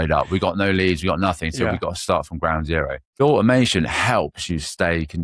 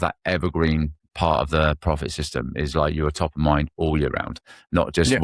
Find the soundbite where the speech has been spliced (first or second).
first